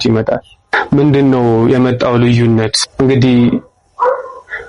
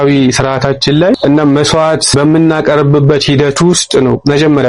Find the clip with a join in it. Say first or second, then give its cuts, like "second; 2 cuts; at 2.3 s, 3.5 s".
second; 2 cuts; at 1.1 s, 2.1 s